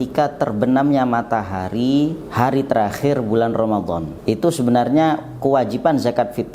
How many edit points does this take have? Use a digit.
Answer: 2